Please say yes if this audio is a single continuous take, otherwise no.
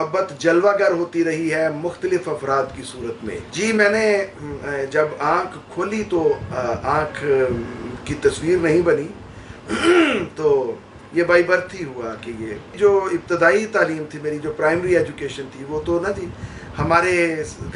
yes